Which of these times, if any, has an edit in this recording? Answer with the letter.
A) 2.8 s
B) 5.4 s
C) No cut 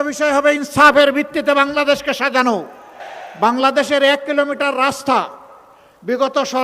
A